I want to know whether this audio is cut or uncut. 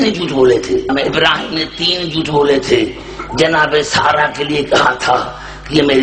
cut